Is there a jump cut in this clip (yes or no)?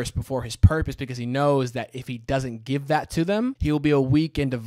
yes